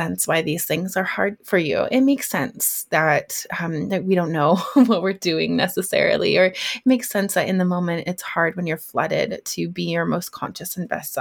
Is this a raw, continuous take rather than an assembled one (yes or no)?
no